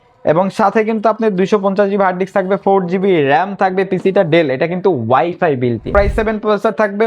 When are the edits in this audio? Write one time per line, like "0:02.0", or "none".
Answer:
0:05.9